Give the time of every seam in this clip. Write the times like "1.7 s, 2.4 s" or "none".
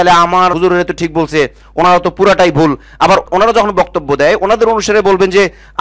none